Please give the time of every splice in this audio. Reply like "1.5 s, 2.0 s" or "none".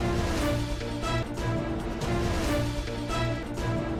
none